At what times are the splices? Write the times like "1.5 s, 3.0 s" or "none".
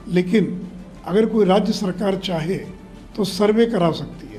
none

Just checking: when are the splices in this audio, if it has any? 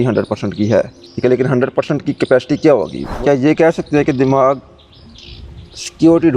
1.0 s, 3.0 s

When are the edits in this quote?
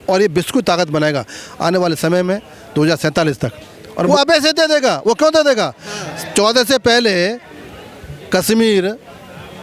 4.1 s

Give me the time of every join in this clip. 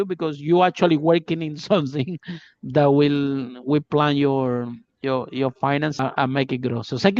6.0 s

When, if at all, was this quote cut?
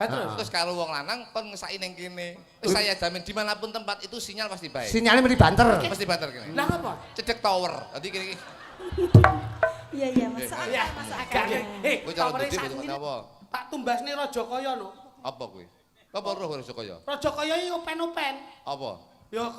12.5 s

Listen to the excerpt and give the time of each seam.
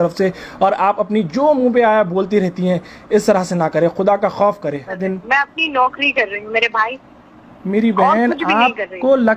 5.0 s

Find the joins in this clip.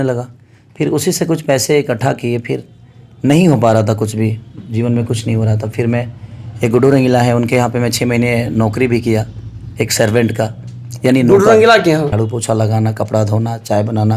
12.1 s

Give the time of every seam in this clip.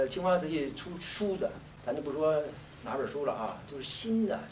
1.7 s

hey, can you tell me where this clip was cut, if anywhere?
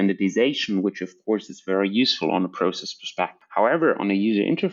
3.4 s

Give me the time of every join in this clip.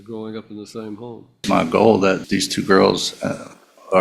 1.4 s, 2.2 s

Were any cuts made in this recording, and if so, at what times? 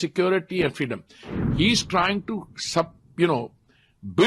1.2 s

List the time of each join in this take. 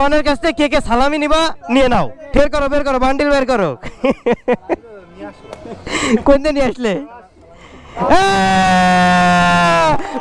2.4 s

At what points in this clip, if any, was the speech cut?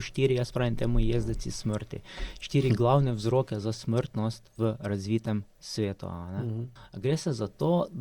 6.8 s

